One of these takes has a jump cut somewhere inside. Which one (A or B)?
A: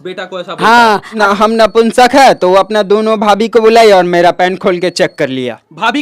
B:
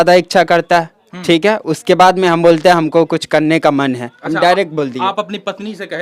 A